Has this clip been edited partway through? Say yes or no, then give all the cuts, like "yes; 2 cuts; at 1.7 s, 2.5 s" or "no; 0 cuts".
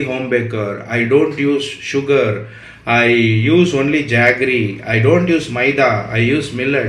no; 0 cuts